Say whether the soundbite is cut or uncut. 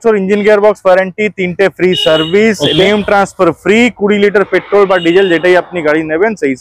uncut